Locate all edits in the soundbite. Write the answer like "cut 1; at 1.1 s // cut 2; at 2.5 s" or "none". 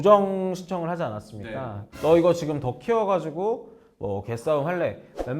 cut 1; at 1.8 s

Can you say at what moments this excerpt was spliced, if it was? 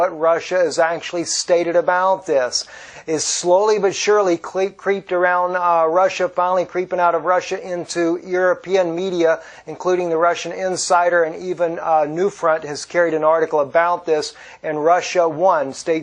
cut 1; at 1.3 s

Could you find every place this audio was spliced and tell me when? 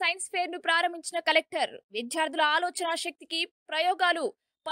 none

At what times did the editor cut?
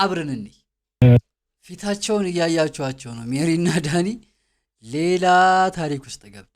cut 1; at 1.0 s

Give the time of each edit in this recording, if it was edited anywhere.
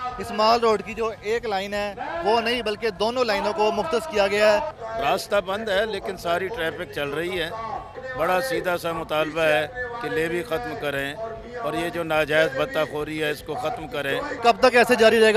none

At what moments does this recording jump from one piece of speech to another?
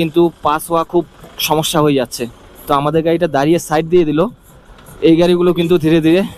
none

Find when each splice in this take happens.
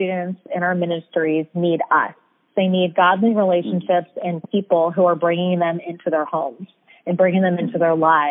cut 1; at 2.4 s

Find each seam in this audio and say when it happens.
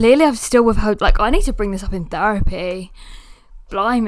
none

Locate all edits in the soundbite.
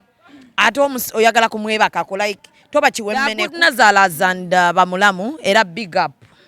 cut 1; at 3.5 s

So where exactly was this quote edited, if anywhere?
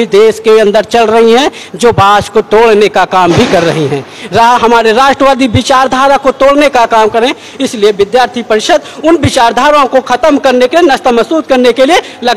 none

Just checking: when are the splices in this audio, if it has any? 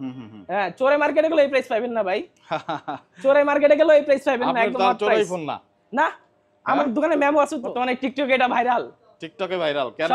cut 1; at 7.7 s

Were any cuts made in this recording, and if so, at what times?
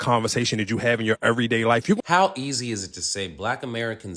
cut 1; at 2.0 s

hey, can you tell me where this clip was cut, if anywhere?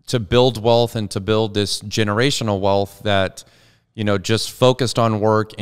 none

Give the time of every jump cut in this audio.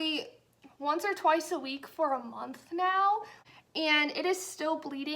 cut 1; at 3.3 s

